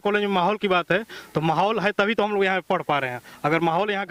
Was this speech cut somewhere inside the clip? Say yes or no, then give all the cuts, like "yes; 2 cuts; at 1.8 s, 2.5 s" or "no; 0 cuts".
no; 0 cuts